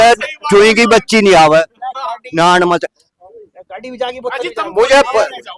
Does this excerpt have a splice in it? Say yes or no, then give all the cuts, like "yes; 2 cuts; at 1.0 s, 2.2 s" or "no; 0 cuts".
no; 0 cuts